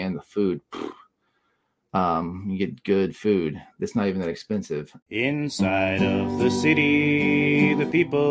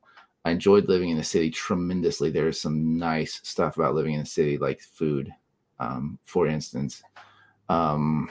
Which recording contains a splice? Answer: first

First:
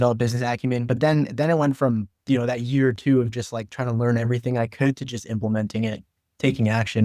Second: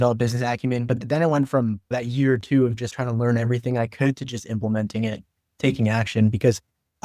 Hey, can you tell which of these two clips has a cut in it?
second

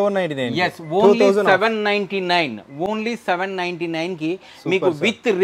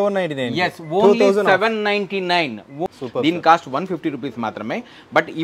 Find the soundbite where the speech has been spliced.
second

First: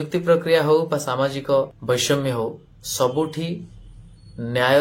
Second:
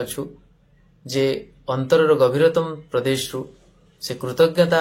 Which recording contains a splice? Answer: first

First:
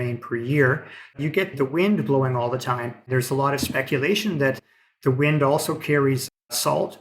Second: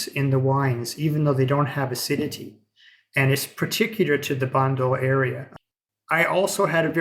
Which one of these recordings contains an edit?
first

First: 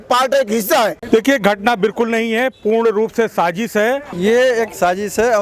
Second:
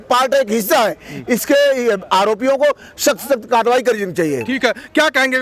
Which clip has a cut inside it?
first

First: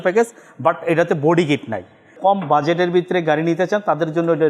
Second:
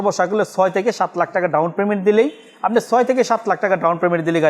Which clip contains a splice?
first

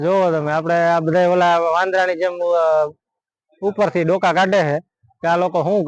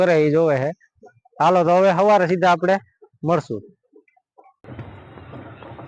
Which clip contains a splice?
second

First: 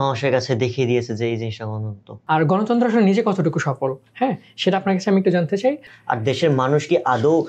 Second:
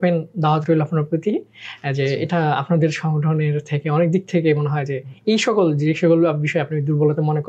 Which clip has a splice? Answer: first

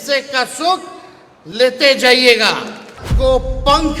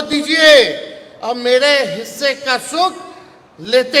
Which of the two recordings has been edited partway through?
first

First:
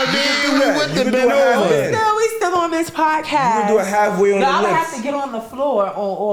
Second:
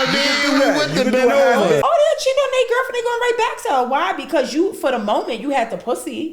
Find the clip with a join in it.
second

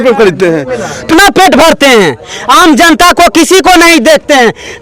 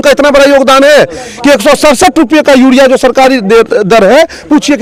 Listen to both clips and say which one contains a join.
first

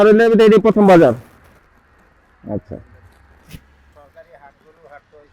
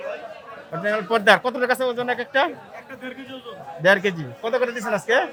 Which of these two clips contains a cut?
first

